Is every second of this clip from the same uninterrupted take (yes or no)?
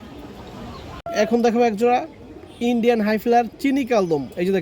no